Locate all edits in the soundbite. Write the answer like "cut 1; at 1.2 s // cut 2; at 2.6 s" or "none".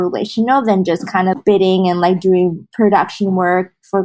cut 1; at 1.4 s // cut 2; at 2.6 s